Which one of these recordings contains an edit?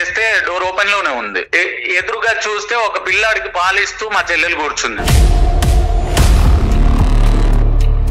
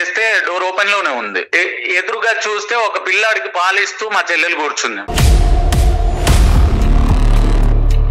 first; 1 cut; at 5.0 s

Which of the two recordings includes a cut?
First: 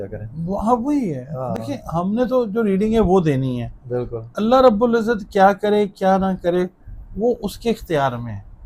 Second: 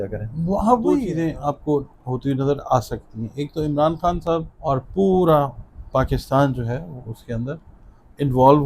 second; 2 cuts; at 1.1 s, 4.5 s

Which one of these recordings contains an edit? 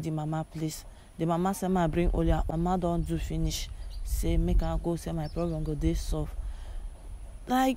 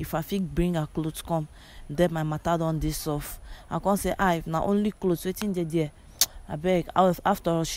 first; 1 cut; at 2.4 s

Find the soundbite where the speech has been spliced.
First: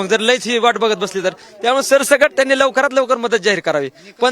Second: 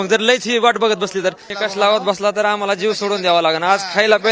second; 1 cut; at 1.5 s

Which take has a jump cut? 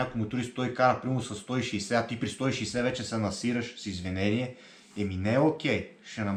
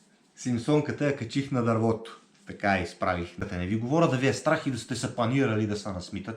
second; 1 cut; at 3.4 s

